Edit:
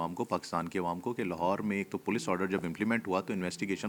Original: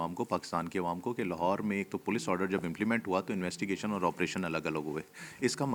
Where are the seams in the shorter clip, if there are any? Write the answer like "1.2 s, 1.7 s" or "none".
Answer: none